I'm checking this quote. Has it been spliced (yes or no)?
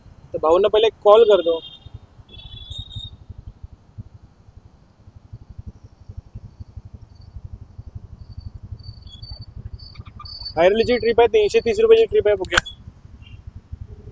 no